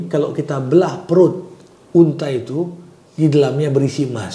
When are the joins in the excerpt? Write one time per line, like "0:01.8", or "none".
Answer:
none